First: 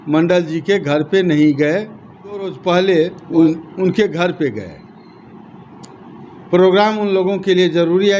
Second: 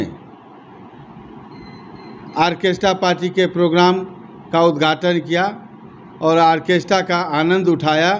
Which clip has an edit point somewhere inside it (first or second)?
first